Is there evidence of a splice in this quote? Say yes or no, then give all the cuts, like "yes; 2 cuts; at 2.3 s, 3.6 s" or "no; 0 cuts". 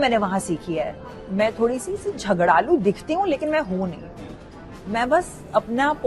yes; 1 cut; at 1.0 s